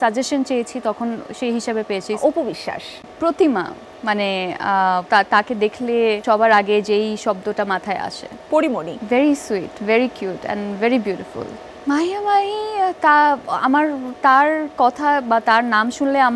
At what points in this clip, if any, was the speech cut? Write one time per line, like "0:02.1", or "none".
0:02.2
0:05.0
0:06.2
0:08.6
0:11.6